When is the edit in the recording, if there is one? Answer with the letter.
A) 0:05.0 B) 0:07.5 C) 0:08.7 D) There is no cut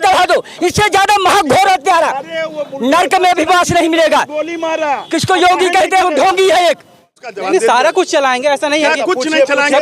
B